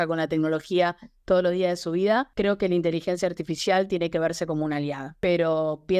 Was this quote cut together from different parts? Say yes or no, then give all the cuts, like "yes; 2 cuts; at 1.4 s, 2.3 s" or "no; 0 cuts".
yes; 2 cuts; at 2.3 s, 5.0 s